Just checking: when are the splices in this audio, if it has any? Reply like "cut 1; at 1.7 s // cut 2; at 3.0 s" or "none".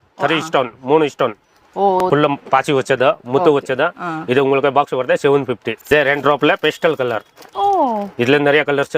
cut 1; at 2.1 s // cut 2; at 5.7 s